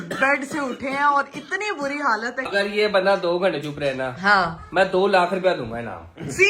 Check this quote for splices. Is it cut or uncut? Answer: cut